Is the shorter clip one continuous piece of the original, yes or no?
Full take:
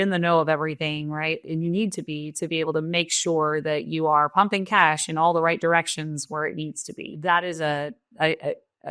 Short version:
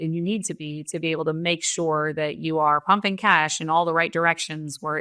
yes